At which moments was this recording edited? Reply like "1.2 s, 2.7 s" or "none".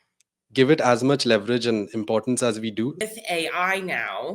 3.0 s

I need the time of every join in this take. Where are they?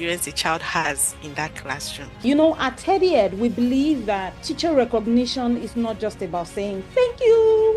2.2 s, 4.4 s

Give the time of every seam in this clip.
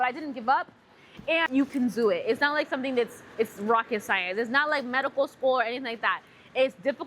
1.5 s

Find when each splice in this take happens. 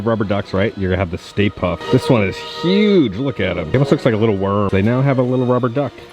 none

